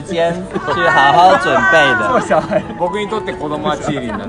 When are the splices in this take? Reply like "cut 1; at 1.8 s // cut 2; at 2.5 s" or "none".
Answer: cut 1; at 2.7 s